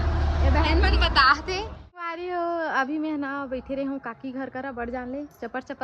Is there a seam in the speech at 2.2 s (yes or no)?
yes